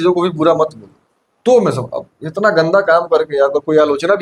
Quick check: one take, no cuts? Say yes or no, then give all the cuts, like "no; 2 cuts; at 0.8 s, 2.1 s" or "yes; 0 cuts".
yes; 0 cuts